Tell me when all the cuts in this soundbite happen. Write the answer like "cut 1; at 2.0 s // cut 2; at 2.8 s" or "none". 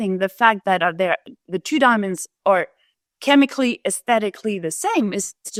none